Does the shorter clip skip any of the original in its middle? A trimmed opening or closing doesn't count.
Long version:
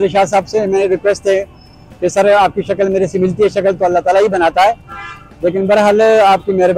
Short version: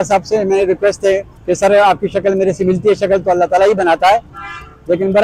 yes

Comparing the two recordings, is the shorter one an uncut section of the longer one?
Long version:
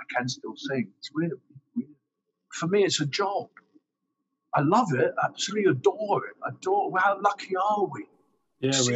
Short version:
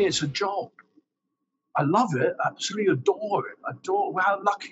yes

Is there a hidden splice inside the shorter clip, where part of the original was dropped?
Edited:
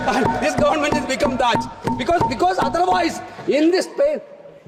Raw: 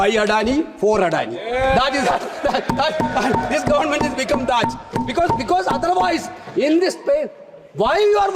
no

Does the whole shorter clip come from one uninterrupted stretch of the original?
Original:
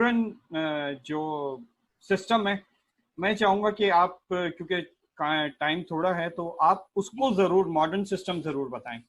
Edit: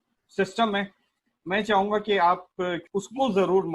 no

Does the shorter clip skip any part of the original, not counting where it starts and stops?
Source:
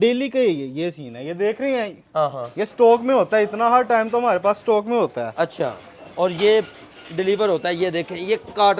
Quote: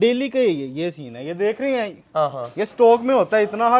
no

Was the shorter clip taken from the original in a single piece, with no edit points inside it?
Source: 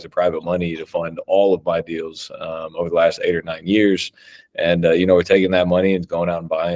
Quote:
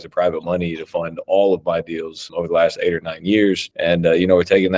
no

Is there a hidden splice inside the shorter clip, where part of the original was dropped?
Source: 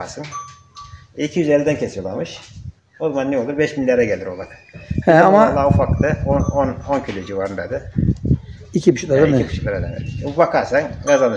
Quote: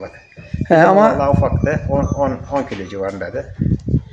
no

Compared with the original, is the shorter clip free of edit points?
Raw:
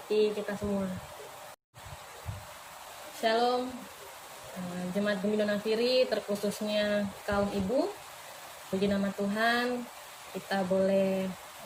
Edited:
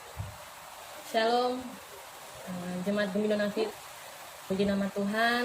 no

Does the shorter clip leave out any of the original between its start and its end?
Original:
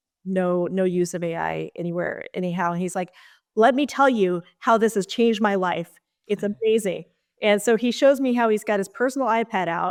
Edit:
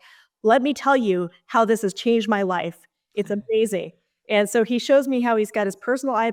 no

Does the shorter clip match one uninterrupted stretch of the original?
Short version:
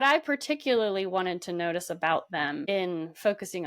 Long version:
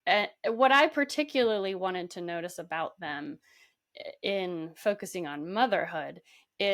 no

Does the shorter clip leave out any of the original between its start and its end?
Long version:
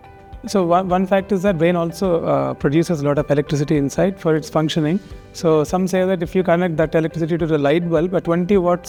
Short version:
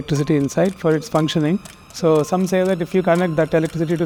no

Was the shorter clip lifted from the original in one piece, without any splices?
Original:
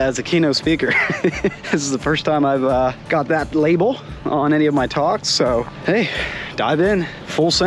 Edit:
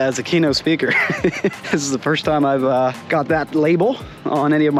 yes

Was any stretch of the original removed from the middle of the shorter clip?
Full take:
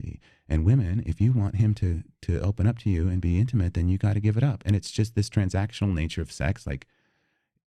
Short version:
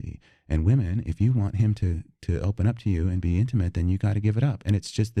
no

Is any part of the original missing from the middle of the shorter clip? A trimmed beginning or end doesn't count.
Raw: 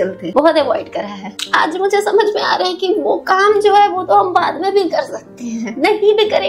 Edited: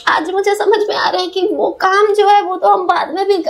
no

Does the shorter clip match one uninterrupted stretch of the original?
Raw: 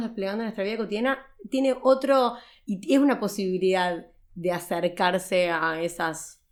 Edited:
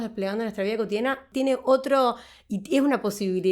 no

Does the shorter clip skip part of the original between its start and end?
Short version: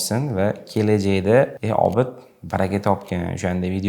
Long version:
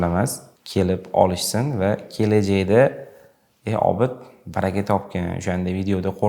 yes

